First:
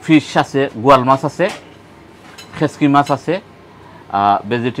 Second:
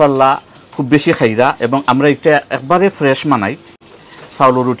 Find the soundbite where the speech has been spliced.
second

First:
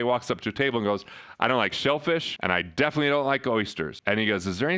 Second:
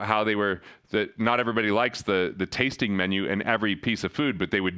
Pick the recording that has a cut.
first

